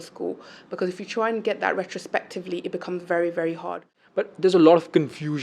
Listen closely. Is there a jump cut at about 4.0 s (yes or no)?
yes